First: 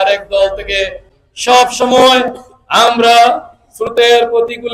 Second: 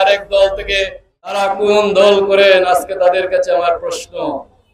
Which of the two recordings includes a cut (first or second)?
second